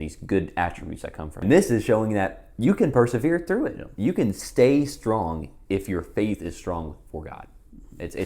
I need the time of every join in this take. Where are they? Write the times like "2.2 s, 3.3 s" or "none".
1.4 s